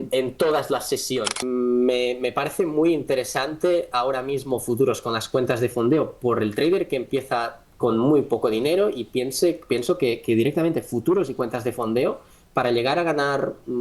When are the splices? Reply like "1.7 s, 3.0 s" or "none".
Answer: 1.5 s